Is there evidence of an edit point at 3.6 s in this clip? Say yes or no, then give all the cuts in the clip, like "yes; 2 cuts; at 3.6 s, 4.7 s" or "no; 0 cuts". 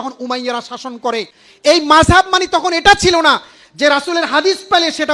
no; 1 cut; at 1.4 s